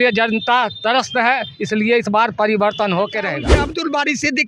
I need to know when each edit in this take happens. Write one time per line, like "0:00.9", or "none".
0:03.5